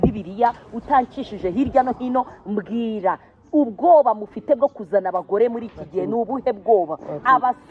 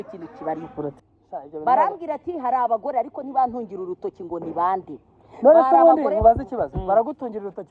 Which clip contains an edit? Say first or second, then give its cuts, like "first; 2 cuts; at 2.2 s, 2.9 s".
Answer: second; 1 cut; at 1.0 s